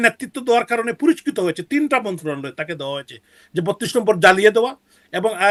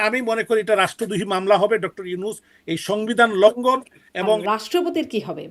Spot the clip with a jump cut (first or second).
second